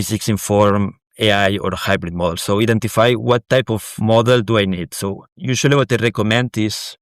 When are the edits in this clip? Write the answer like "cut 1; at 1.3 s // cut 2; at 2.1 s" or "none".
cut 1; at 3.8 s